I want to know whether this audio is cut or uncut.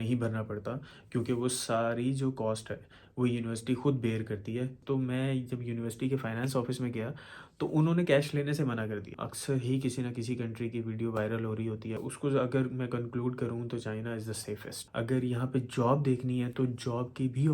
cut